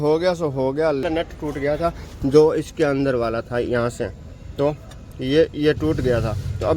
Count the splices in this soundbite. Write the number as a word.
one